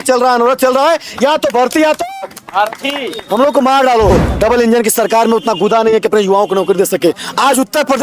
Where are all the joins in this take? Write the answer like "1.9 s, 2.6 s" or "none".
4.2 s